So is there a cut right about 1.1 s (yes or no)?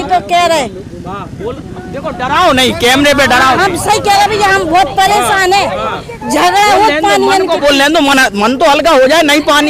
no